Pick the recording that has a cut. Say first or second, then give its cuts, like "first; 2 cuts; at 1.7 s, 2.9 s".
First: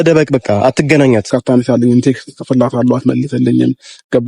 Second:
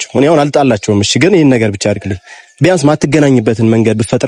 first; 1 cut; at 1.3 s